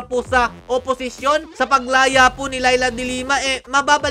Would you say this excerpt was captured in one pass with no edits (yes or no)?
yes